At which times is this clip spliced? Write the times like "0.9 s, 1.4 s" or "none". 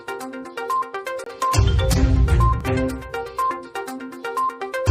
4.0 s